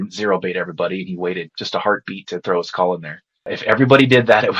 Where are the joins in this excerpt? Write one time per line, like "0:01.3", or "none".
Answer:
0:01.5
0:03.5